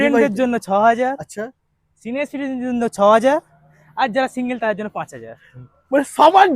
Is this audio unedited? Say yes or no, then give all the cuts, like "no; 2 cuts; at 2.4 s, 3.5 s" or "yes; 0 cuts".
yes; 0 cuts